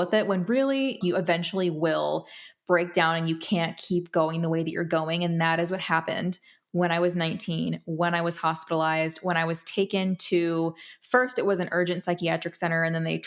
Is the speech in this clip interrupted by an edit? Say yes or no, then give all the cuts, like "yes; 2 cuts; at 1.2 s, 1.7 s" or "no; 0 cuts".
yes; 1 cut; at 1.0 s